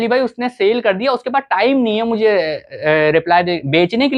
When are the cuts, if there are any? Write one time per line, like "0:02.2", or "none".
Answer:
none